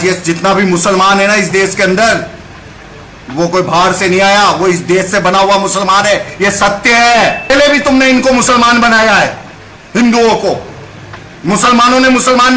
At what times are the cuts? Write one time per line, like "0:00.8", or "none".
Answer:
0:07.5